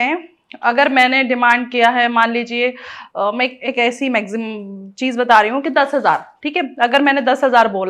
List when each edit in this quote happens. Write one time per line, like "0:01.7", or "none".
none

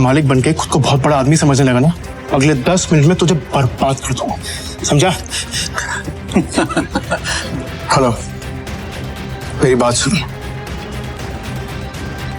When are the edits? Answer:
0:02.1
0:07.3
0:11.2

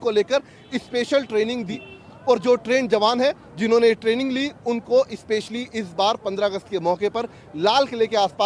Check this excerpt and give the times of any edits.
0:01.7

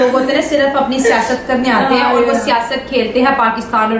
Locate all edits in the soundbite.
none

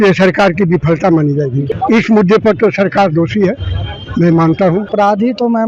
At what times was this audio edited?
0:01.6
0:04.9

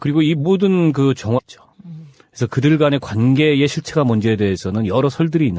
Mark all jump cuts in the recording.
none

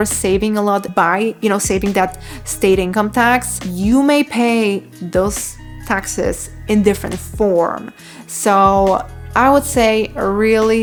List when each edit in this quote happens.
none

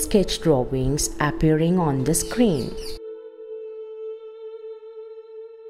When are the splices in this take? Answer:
0:02.7
0:04.8

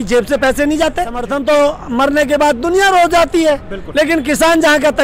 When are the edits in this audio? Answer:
0:01.2

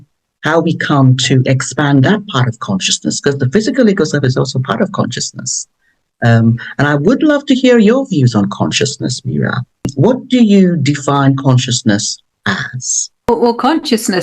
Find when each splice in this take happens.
0:13.3

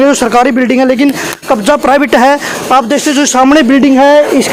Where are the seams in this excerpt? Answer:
none

